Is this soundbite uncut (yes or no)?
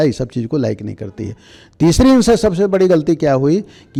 yes